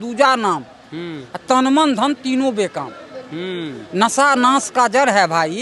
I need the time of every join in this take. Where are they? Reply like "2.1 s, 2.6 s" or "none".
none